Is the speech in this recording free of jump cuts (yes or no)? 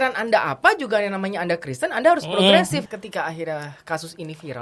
no